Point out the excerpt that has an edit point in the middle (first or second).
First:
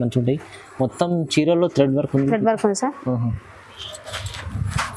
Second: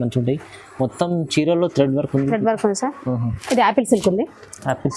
second